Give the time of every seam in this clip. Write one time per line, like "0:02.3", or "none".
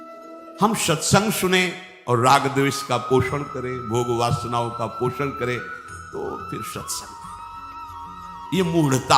0:06.9
0:08.3